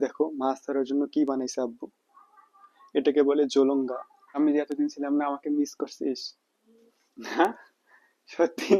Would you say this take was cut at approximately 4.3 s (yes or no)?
yes